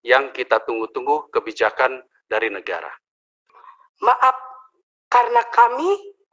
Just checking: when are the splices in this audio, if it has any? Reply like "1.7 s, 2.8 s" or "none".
3.4 s

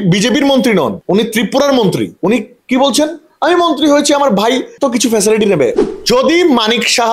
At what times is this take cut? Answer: 1.0 s, 2.1 s, 4.7 s, 5.8 s

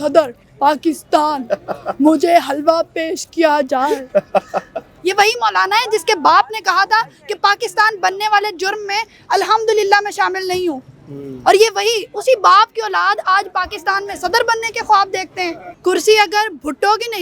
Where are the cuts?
4.9 s, 15.6 s

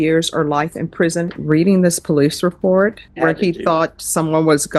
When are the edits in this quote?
1.4 s, 3.0 s

